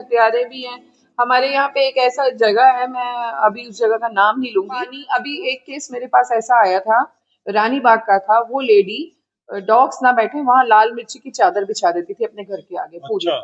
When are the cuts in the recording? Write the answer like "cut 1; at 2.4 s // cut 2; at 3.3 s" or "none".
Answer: cut 1; at 5.0 s